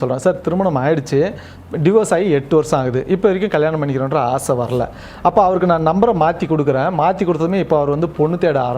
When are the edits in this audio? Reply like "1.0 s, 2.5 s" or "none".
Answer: none